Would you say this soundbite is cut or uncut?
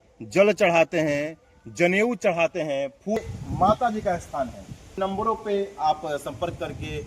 cut